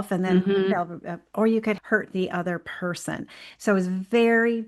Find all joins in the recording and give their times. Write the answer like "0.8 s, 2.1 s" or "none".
1.8 s